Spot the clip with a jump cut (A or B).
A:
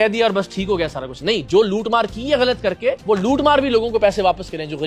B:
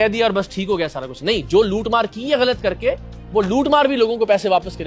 A